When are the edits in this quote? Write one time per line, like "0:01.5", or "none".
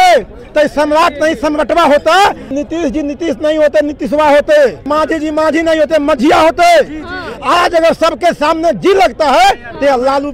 0:02.6
0:04.9
0:07.2